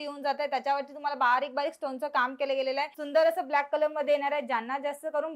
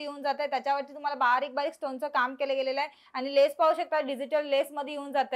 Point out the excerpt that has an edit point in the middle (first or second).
first